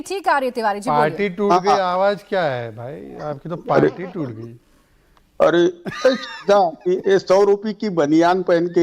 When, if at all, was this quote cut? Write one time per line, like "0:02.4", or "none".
0:03.1